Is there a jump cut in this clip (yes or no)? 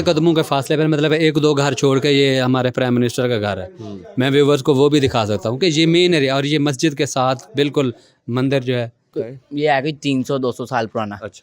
yes